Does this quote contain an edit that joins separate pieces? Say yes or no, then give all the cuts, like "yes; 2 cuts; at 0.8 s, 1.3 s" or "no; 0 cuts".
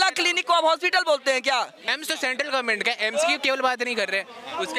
yes; 1 cut; at 1.9 s